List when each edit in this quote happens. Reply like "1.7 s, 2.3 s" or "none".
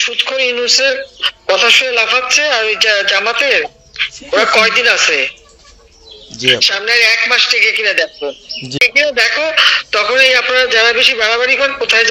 8.8 s